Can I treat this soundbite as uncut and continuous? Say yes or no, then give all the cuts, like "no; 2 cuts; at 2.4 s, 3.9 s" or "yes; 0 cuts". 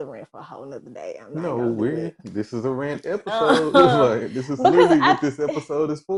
yes; 0 cuts